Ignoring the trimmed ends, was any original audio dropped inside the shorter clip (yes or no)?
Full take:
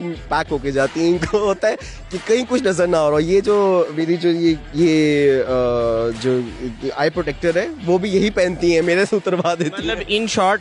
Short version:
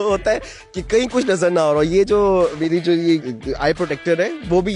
yes